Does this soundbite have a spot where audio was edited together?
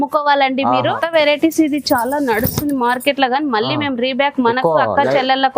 yes; 1 cut; at 0.9 s

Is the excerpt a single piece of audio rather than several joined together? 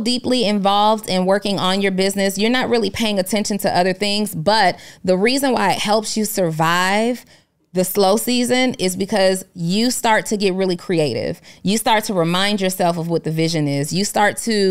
yes; 0 cuts

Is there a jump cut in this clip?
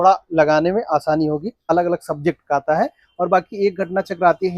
yes; 1 cut; at 1.7 s

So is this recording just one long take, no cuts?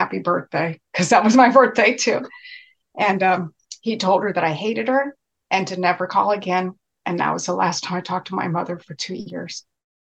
yes; 0 cuts

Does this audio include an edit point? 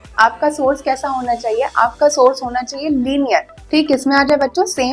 yes; 1 cut; at 3.6 s

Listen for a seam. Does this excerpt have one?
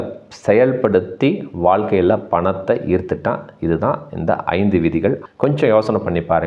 yes; 1 cut; at 5.2 s

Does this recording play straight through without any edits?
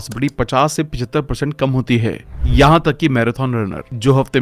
no; 1 cut; at 2.3 s

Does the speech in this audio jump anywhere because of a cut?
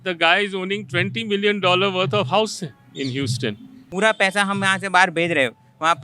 yes; 1 cut; at 3.7 s

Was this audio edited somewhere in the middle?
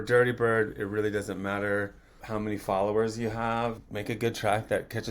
yes; 2 cuts; at 2.2 s, 3.8 s

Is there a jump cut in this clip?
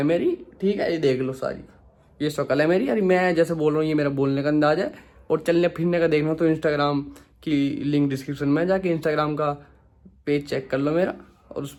no; 0 cuts

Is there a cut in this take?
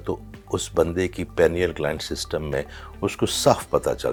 no; 0 cuts

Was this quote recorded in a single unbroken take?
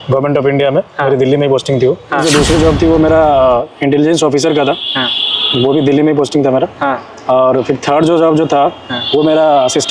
no; 1 cut; at 2.2 s

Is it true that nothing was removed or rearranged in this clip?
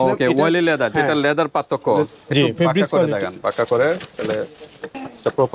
yes; 0 cuts

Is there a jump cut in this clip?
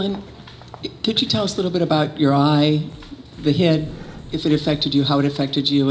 no; 0 cuts

